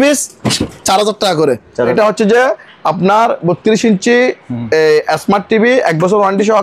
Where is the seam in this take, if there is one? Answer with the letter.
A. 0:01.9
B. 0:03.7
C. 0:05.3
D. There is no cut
A